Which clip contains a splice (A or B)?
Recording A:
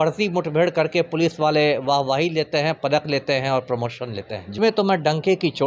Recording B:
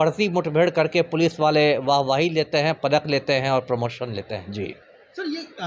A